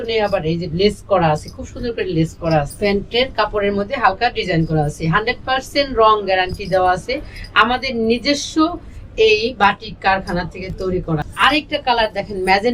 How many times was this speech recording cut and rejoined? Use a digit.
2